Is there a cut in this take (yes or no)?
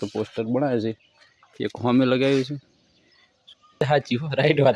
yes